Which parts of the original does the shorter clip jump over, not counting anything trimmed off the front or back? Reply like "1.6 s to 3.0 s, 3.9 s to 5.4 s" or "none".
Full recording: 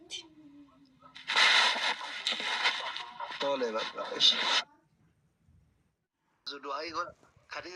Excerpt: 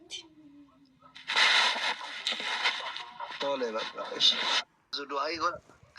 4.8 s to 6.3 s